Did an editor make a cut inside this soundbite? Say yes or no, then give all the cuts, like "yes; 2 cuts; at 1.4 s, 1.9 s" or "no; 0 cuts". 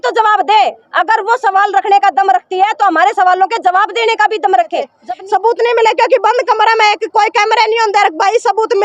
yes; 1 cut; at 5.0 s